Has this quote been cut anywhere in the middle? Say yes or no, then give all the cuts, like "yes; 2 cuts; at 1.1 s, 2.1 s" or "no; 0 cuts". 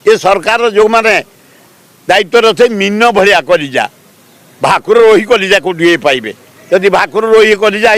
no; 0 cuts